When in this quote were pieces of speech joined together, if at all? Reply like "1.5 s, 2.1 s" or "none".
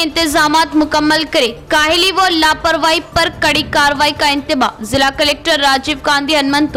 none